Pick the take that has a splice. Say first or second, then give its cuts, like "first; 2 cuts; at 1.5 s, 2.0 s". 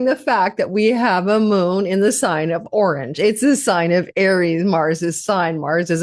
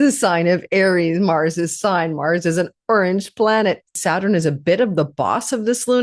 second; 1 cut; at 3.9 s